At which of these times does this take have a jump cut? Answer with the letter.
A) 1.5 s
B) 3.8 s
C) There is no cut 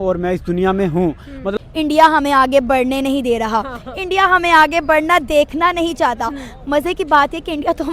A